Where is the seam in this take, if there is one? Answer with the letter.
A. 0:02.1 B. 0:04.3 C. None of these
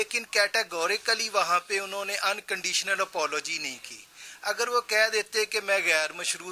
C